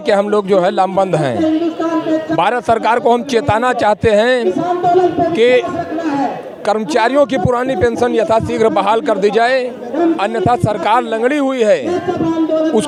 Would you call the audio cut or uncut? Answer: uncut